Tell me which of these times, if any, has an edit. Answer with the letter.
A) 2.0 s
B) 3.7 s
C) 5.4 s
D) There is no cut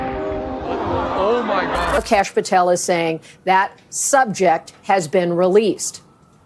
A